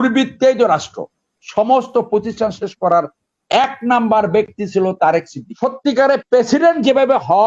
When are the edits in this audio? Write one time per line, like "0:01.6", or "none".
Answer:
0:05.4